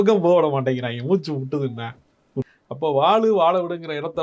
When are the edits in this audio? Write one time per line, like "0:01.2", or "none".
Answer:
0:02.5